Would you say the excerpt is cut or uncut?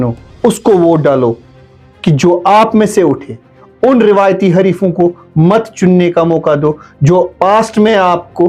uncut